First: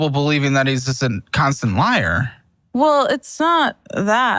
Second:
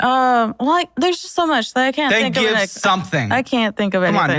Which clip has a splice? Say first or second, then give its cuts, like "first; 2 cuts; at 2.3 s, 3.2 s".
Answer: second; 2 cuts; at 1.0 s, 2.1 s